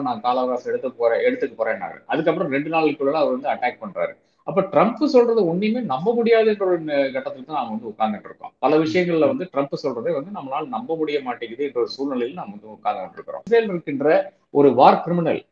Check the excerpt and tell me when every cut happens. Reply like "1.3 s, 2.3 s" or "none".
13.4 s